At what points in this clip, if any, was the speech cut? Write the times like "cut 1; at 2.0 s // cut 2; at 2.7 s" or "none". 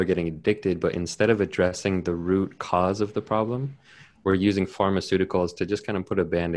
none